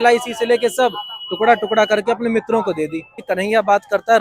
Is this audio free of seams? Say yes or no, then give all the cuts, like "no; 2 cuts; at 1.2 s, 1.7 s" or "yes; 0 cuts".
no; 1 cut; at 3.2 s